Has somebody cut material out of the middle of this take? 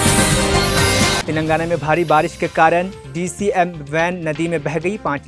yes; 1 cut; at 1.2 s

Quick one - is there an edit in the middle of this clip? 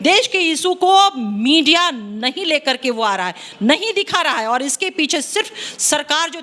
no; 0 cuts

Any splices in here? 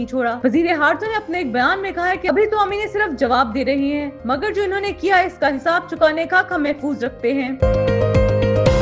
yes; 1 cut; at 7.6 s

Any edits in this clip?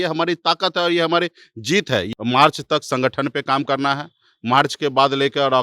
yes; 1 cut; at 2.1 s

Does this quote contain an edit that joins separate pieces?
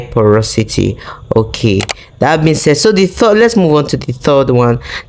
no; 0 cuts

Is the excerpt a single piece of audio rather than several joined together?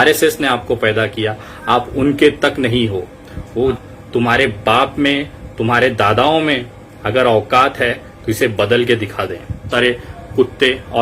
no; 2 cuts; at 3.8 s, 9.7 s

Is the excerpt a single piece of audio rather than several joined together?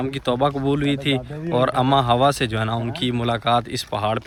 yes; 0 cuts

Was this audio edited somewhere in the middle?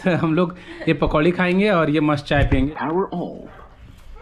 yes; 1 cut; at 2.7 s

